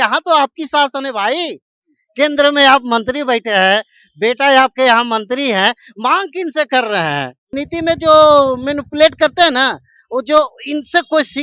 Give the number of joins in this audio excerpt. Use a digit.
1